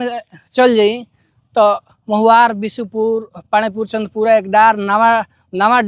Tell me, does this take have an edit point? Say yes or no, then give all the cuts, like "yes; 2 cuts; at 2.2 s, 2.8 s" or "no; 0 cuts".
no; 0 cuts